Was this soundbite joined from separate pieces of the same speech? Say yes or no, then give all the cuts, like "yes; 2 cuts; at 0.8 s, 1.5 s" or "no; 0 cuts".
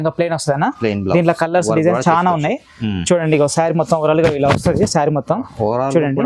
no; 0 cuts